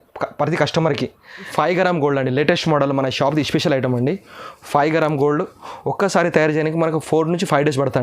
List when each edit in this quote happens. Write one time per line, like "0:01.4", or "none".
0:01.5